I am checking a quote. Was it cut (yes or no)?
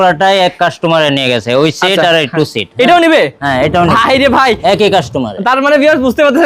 no